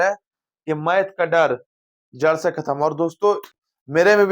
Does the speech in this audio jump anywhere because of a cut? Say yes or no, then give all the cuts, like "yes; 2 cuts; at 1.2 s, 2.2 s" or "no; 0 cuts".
yes; 1 cut; at 3.2 s